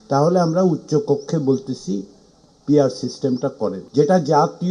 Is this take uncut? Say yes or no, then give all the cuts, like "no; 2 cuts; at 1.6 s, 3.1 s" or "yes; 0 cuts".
no; 1 cut; at 3.8 s